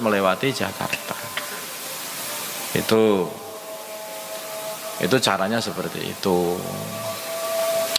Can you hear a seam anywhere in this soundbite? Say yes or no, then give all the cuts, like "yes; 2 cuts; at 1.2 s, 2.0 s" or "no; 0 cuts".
no; 0 cuts